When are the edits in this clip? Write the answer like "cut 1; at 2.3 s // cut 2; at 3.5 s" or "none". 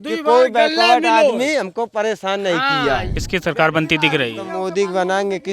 cut 1; at 3.1 s

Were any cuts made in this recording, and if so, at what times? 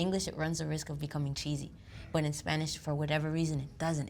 none

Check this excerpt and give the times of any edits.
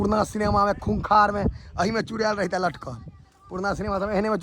none

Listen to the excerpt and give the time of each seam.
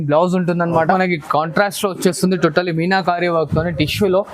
cut 1; at 0.9 s

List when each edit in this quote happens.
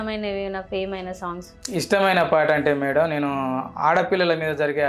cut 1; at 1.5 s

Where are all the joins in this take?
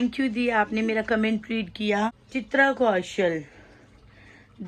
cut 1; at 2.2 s

